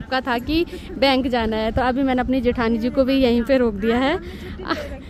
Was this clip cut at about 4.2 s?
no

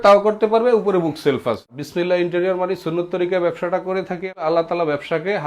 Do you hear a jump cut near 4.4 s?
yes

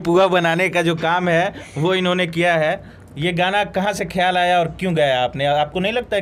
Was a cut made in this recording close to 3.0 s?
no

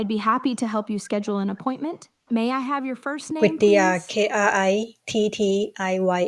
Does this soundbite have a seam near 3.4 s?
yes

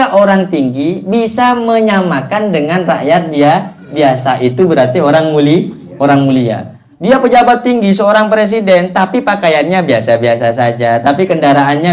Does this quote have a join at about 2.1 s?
no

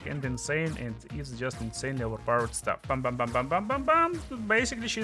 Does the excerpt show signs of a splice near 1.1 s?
no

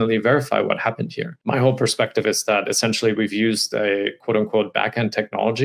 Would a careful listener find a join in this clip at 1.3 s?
yes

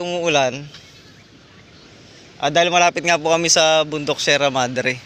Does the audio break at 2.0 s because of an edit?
no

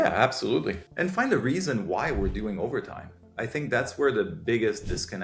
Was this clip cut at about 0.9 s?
yes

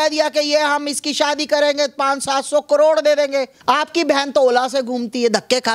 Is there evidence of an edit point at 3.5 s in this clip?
yes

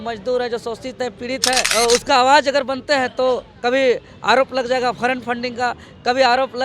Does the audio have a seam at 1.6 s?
yes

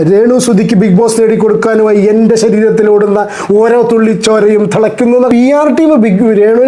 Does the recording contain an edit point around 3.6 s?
no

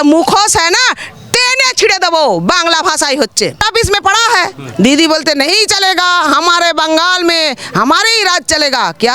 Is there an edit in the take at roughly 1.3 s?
no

